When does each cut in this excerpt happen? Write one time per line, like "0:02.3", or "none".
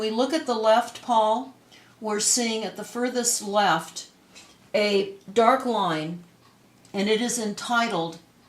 0:05.9